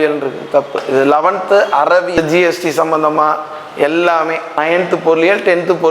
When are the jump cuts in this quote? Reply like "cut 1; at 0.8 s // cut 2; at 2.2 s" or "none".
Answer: cut 1; at 2.1 s // cut 2; at 4.6 s

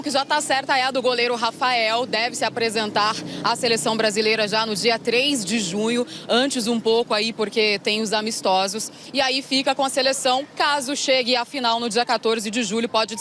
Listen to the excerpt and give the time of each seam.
none

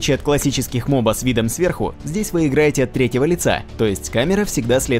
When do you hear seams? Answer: cut 1; at 2.3 s

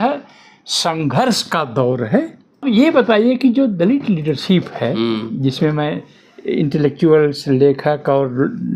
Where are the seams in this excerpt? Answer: cut 1; at 2.6 s

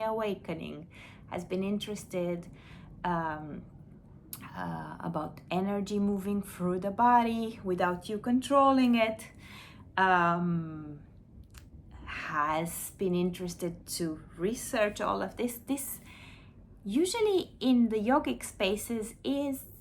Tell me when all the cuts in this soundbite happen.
none

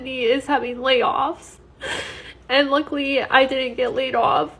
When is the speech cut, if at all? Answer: none

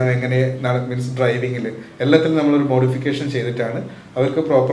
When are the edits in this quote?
none

